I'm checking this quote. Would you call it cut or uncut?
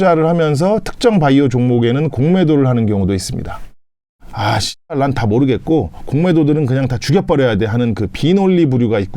cut